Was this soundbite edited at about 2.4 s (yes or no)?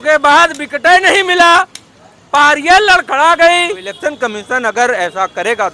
no